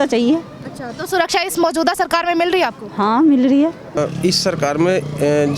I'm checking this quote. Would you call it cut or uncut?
cut